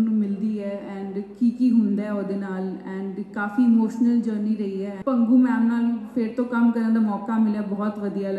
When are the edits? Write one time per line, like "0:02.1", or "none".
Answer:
0:04.9